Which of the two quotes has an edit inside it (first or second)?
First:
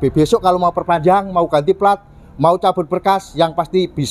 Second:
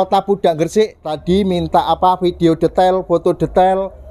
second